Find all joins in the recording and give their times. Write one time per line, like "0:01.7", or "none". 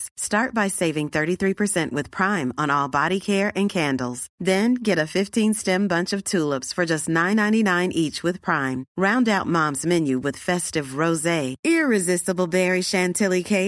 none